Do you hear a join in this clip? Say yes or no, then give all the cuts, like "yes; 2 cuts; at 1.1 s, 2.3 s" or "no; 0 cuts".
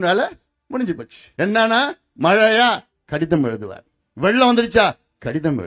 yes; 1 cut; at 1.2 s